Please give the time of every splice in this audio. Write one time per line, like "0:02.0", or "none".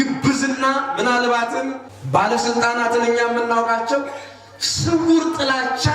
0:01.8